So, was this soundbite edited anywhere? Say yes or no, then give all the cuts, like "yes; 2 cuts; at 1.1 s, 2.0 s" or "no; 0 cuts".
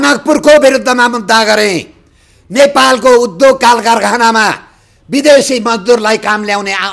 no; 0 cuts